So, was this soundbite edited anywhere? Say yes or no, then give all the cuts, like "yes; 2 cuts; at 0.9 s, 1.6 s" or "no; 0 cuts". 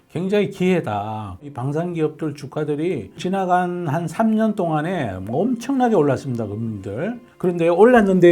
yes; 2 cuts; at 1.5 s, 3.2 s